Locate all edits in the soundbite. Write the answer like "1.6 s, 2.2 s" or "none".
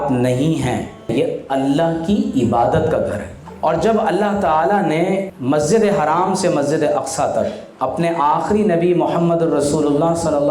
1.0 s, 5.3 s, 7.6 s